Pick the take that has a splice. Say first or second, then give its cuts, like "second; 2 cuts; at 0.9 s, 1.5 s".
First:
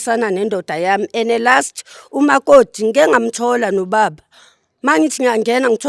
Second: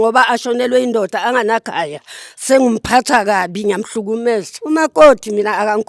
second; 1 cut; at 4.5 s